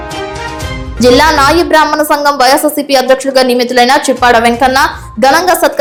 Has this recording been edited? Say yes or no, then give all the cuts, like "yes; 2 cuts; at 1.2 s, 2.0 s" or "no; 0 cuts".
no; 0 cuts